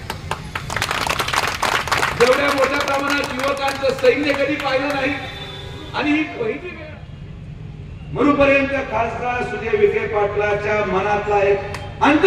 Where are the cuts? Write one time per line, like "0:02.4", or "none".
0:06.7